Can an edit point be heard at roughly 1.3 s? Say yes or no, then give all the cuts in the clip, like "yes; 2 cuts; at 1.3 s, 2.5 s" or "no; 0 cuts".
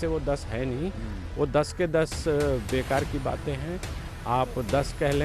no; 0 cuts